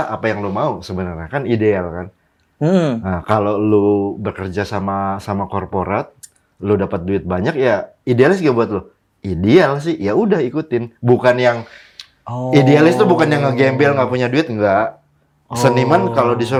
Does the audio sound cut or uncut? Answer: uncut